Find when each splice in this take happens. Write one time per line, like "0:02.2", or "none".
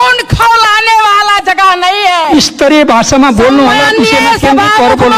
none

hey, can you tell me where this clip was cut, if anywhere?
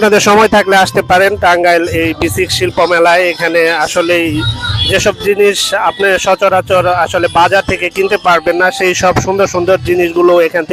none

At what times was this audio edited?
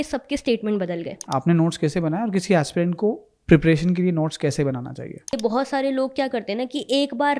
0:01.2
0:05.3

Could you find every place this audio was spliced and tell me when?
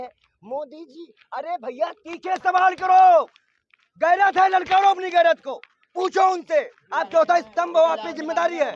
none

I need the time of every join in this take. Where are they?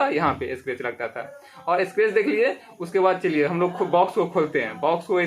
none

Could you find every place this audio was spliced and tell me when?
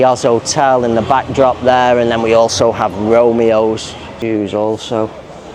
0:04.1

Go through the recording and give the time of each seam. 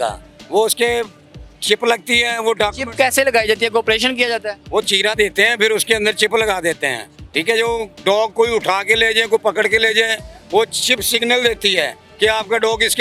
none

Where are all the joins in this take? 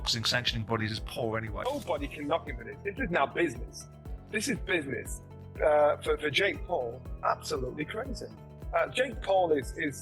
0:01.7

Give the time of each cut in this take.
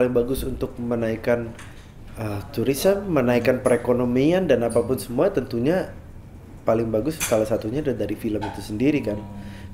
none

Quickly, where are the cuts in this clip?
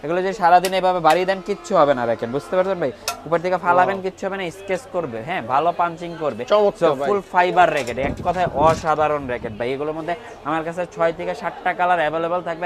none

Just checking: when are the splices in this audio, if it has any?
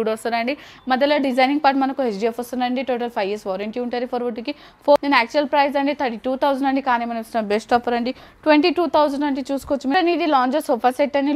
0:05.0
0:09.9

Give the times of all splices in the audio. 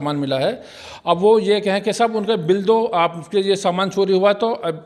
none

